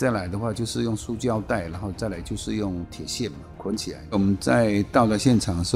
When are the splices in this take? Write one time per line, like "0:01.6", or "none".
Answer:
0:04.1